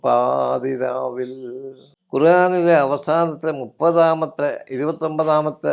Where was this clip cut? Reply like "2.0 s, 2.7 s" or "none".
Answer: 1.9 s